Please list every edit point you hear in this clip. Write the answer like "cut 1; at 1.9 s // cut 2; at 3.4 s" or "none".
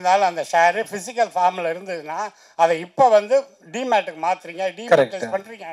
none